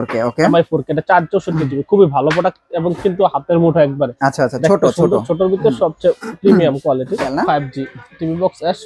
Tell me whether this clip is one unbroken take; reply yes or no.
no